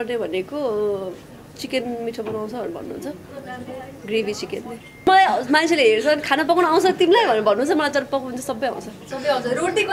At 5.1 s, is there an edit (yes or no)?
yes